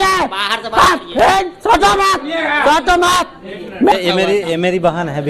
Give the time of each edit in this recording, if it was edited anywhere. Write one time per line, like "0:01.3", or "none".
0:03.9